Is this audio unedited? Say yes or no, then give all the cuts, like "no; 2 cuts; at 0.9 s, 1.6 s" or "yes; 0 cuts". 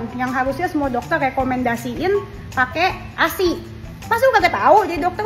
yes; 0 cuts